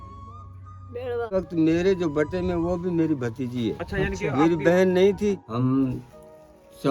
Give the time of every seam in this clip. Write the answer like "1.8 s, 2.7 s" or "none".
1.3 s, 5.5 s